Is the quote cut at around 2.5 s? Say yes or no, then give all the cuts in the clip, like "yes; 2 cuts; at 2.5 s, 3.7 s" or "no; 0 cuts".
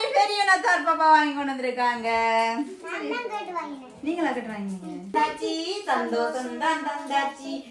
no; 1 cut; at 5.1 s